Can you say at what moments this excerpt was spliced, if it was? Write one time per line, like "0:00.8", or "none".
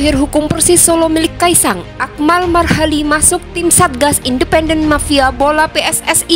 none